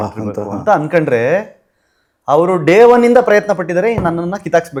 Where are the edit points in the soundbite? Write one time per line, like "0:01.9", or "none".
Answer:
none